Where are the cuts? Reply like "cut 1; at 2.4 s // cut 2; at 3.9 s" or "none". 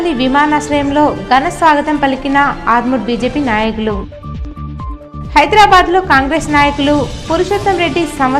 none